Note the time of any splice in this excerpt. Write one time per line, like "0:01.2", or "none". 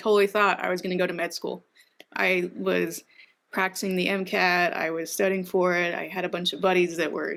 none